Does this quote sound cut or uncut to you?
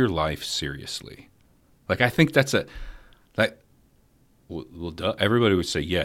uncut